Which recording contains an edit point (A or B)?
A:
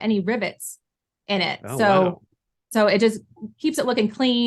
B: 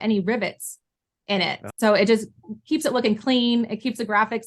B